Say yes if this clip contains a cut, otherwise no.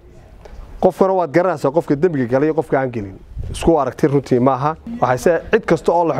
yes